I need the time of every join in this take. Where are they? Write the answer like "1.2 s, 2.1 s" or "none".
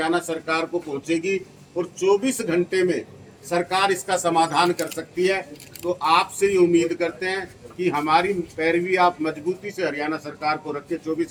none